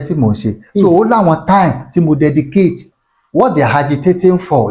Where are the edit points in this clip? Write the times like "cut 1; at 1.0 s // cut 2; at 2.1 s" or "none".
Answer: cut 1; at 2.9 s